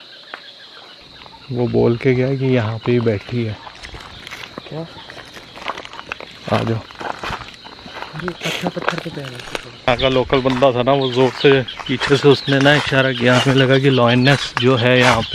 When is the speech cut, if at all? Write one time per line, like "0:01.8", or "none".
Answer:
0:01.0
0:09.9